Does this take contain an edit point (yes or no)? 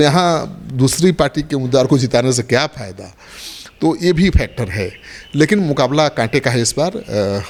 no